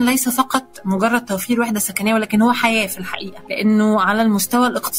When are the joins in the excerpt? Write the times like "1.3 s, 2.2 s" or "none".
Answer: none